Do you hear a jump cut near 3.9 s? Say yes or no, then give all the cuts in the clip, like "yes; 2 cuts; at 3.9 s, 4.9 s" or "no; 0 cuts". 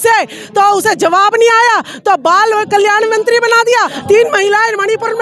yes; 1 cut; at 3.9 s